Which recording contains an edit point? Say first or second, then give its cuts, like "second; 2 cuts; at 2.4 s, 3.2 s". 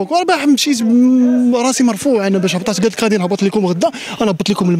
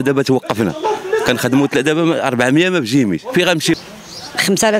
second; 1 cut; at 3.8 s